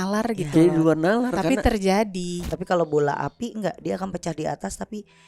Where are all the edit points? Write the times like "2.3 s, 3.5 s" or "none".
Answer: 2.4 s